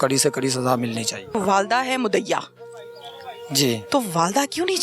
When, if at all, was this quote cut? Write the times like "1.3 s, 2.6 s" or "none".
1.3 s, 3.8 s